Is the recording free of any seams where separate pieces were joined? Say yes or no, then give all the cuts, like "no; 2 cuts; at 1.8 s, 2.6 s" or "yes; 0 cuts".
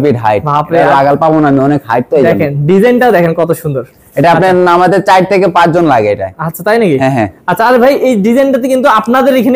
yes; 0 cuts